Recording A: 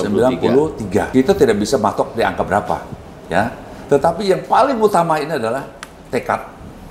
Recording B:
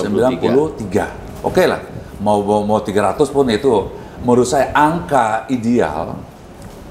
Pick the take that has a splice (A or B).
A